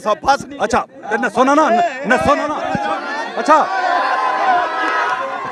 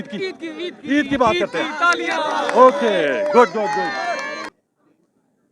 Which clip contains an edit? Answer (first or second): second